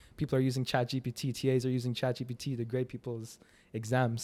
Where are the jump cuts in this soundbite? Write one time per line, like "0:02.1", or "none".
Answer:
none